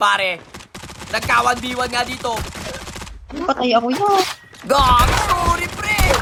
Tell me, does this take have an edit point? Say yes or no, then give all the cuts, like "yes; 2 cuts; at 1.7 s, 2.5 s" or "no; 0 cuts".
no; 0 cuts